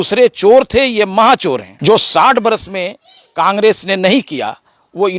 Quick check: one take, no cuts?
no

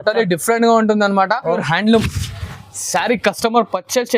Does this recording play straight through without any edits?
no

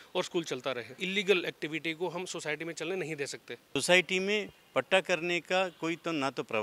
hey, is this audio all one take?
no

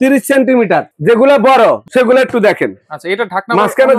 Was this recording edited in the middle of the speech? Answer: yes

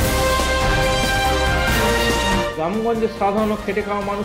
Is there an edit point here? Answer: no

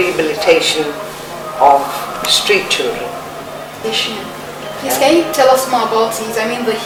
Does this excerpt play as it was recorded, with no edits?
yes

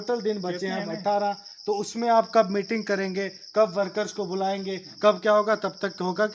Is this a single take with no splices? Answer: yes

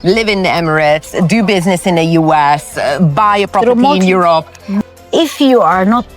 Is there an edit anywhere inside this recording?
yes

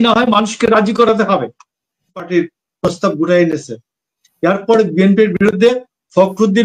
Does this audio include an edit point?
yes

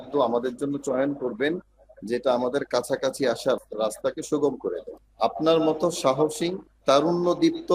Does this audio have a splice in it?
yes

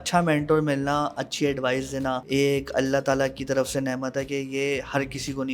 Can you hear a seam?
yes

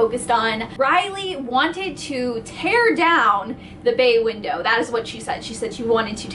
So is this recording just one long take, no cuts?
yes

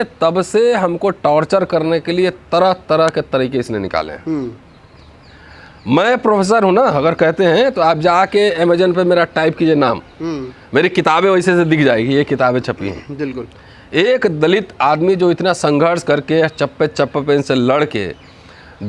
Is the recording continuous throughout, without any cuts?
yes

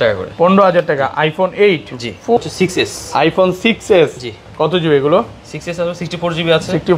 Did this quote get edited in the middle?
yes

